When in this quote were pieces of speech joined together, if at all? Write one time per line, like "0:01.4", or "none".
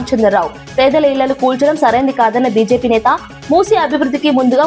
none